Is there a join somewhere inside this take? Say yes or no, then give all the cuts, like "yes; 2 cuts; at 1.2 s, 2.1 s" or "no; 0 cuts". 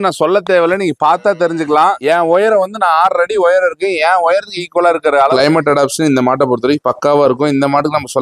yes; 2 cuts; at 2.0 s, 5.3 s